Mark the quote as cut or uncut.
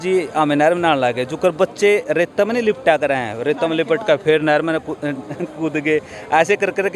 uncut